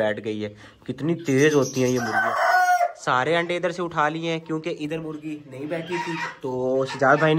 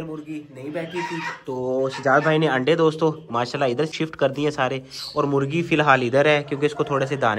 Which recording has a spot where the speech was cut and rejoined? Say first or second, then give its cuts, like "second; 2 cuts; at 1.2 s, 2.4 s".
first; 1 cut; at 2.2 s